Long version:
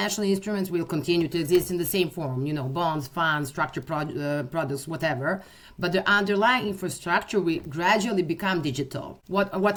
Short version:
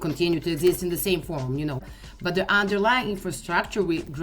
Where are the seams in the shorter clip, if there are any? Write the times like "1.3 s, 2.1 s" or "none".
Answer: 1.8 s